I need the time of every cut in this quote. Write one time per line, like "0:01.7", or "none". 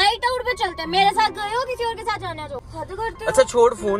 0:02.7